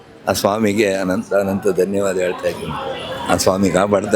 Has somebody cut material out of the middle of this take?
no; 0 cuts

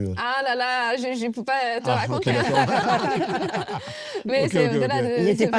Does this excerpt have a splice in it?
no; 0 cuts

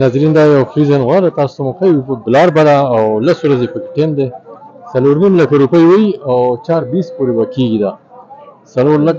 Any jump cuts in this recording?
no; 0 cuts

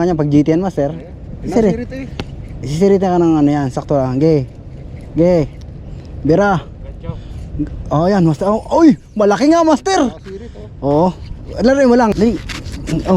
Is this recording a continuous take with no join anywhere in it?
no; 1 cut; at 12.1 s

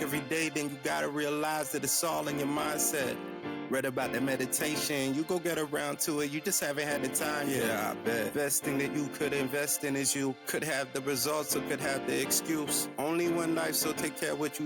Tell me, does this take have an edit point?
no; 0 cuts

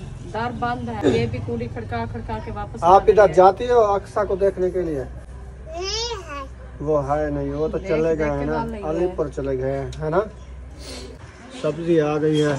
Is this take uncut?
no; 2 cuts; at 1.0 s, 11.3 s

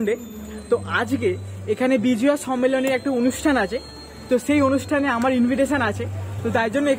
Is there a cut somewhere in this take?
no; 0 cuts

